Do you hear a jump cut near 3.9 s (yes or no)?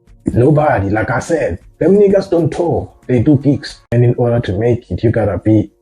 yes